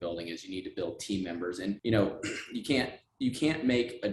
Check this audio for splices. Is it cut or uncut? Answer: cut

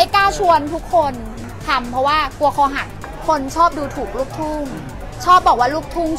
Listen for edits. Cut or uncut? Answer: cut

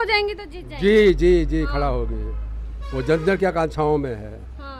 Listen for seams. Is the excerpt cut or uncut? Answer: uncut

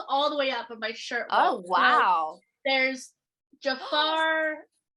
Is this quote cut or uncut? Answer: uncut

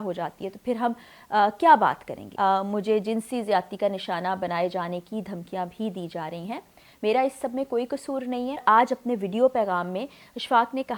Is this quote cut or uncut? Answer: cut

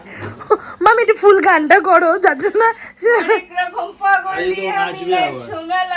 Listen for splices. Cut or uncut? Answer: uncut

